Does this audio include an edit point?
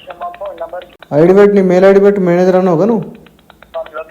yes; 1 cut; at 0.9 s

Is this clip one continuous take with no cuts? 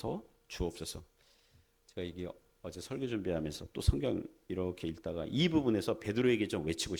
yes; 0 cuts

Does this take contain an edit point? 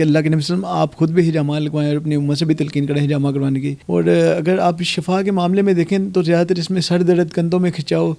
yes; 1 cut; at 3.8 s

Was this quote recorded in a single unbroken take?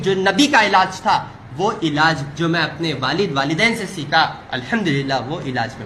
no; 1 cut; at 4.5 s

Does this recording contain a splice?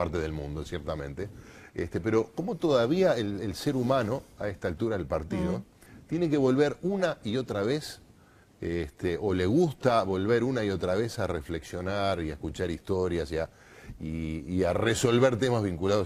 no; 0 cuts

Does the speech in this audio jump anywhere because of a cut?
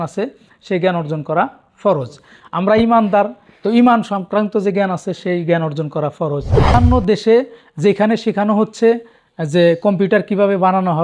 yes; 1 cut; at 6.7 s

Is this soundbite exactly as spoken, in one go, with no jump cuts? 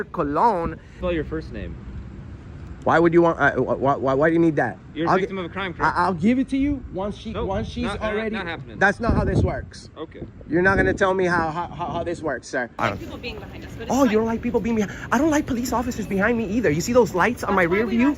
no; 2 cuts; at 1.0 s, 12.7 s

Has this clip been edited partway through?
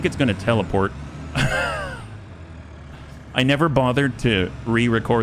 no; 0 cuts

